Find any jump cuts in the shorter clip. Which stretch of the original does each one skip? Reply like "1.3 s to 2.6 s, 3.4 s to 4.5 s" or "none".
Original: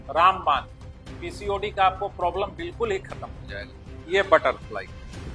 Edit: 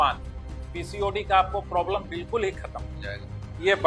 none